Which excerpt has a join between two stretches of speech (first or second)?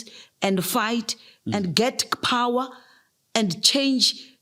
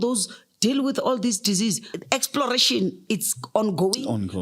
second